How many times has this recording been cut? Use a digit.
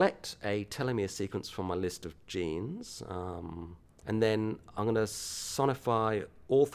1